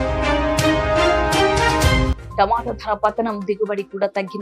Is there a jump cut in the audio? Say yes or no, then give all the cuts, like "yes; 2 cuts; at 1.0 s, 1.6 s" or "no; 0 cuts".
yes; 1 cut; at 2.1 s